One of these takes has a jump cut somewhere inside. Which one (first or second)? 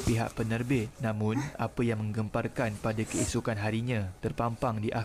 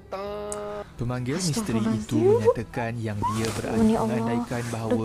second